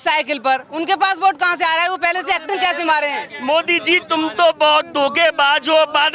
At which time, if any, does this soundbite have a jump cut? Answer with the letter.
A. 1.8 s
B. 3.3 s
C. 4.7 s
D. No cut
B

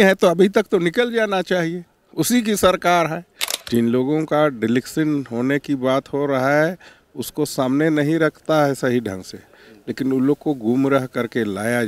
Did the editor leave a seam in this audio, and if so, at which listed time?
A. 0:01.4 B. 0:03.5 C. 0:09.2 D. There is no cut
B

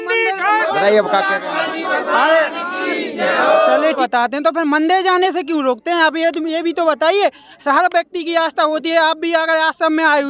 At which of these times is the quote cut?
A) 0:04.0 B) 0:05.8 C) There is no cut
A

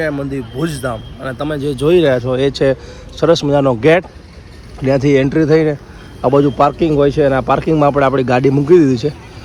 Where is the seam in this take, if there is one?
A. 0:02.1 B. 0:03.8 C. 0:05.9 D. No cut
D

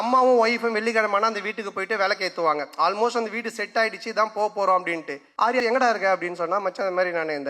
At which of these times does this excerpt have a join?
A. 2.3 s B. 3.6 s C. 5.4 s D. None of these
C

